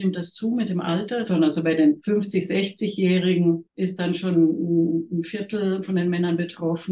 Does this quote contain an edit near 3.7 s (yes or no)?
yes